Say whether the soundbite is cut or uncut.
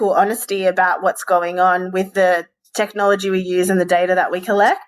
uncut